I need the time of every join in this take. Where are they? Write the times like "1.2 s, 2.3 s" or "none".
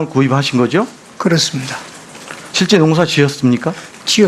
3.4 s

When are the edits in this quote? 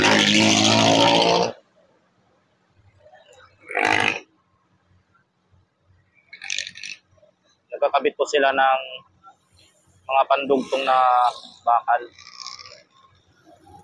none

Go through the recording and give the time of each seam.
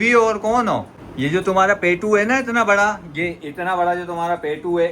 1.0 s

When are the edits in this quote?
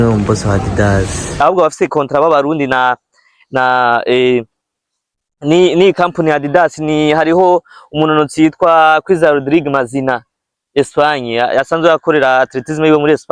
1.4 s

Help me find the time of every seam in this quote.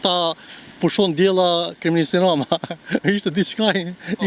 none

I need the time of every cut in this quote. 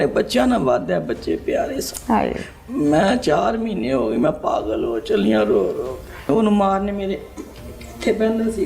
6.3 s

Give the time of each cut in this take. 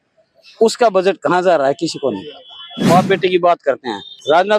2.8 s

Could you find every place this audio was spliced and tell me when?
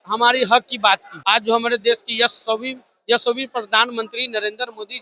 1.1 s

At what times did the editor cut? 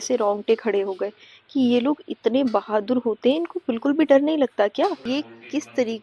5.0 s

